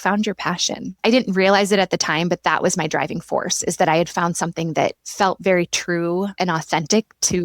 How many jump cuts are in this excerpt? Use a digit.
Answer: 1